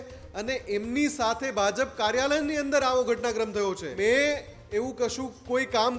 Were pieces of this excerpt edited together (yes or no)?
yes